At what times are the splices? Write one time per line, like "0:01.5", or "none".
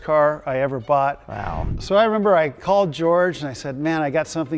none